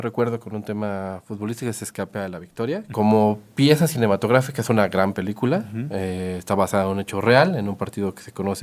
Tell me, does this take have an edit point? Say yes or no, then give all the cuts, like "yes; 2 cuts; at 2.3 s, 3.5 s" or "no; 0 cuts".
yes; 1 cut; at 2.9 s